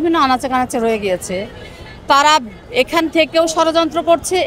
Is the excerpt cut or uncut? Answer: uncut